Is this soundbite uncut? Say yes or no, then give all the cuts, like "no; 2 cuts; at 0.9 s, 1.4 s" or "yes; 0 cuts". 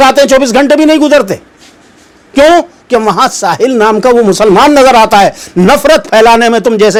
yes; 0 cuts